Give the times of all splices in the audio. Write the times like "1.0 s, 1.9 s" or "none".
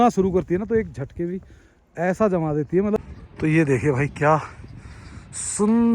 3.0 s